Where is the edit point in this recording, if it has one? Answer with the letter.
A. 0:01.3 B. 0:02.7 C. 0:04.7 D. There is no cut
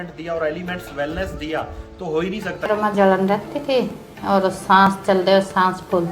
B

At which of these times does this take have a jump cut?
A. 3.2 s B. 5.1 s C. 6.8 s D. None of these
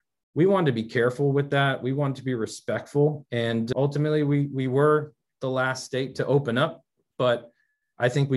A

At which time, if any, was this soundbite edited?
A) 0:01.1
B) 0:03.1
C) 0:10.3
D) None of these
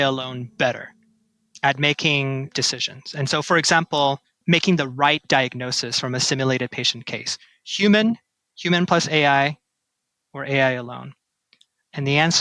D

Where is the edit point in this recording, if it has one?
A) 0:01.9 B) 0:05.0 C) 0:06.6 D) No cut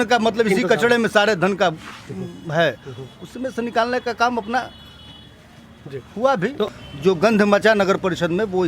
C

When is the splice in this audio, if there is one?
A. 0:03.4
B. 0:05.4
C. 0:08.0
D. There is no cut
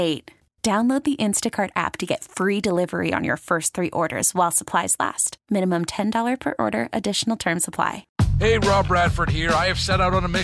C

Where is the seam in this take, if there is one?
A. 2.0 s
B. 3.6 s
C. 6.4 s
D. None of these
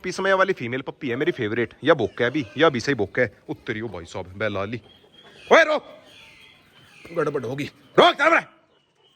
D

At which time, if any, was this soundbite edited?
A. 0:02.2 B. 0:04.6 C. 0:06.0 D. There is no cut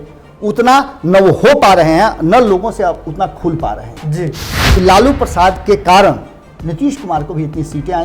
B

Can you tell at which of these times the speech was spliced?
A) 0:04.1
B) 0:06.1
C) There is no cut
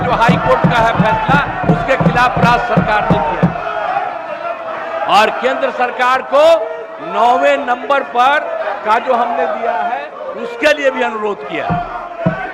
C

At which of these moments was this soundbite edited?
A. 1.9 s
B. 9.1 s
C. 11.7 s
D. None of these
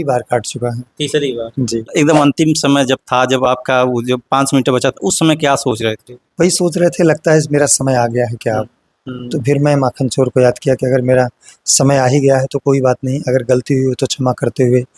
A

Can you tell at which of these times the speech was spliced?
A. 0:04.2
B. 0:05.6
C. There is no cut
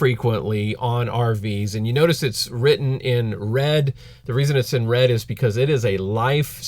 A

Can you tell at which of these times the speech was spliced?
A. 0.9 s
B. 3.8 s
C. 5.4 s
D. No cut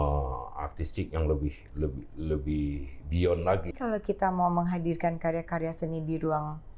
B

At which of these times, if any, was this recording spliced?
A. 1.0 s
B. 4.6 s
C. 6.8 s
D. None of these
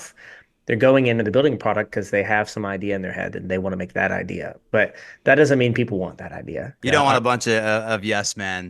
C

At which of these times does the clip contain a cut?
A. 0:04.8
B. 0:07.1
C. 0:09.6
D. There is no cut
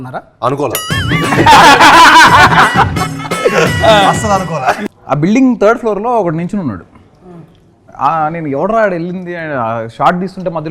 A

